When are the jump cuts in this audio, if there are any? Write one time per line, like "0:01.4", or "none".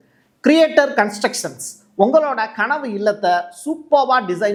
none